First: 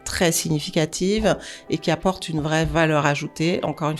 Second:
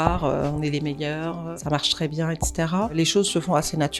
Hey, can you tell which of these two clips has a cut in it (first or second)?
second